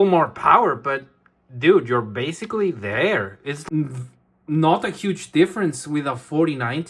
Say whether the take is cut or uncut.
cut